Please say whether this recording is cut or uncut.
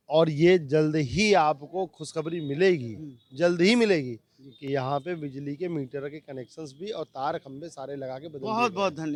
uncut